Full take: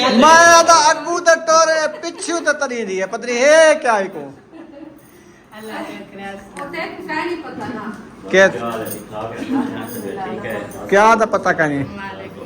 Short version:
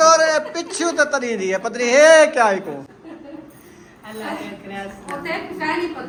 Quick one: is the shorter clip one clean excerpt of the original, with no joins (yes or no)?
yes